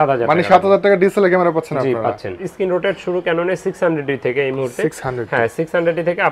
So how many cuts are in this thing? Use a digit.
1